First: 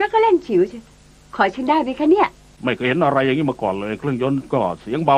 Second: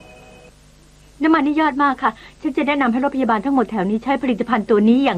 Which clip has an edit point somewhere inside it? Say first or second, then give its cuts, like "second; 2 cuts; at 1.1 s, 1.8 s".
first; 1 cut; at 2.6 s